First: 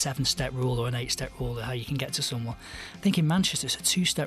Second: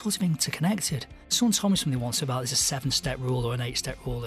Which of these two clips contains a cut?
second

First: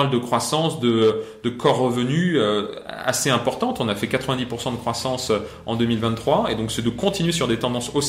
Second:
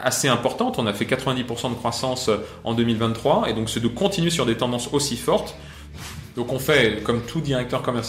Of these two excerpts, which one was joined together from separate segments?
second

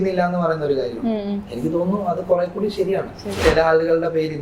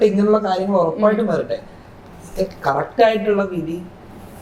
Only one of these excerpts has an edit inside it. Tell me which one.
first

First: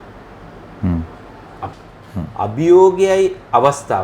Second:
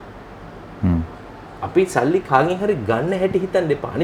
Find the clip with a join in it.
first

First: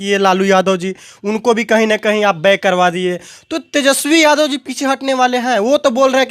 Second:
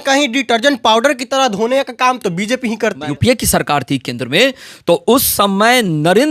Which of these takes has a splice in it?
second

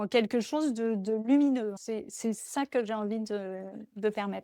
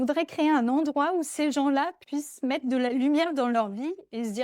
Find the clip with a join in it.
first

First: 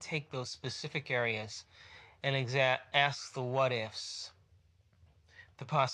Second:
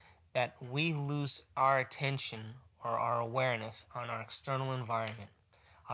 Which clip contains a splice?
second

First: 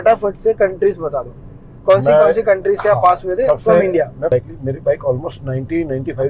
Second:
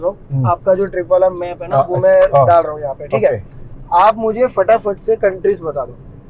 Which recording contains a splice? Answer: first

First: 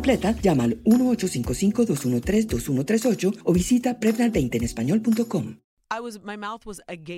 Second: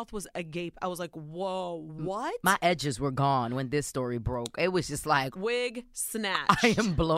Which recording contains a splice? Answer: first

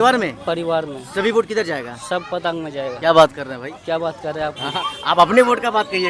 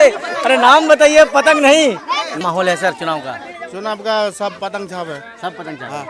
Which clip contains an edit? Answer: second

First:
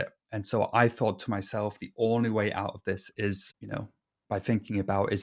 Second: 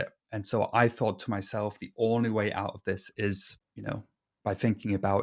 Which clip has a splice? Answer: first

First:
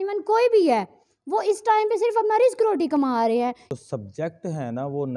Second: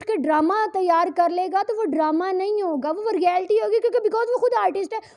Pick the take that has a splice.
first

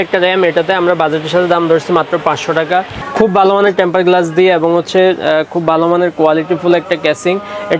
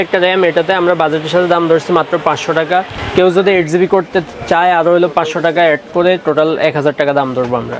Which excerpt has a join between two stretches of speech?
first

